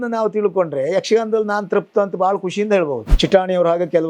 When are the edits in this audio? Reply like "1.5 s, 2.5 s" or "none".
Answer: 3.1 s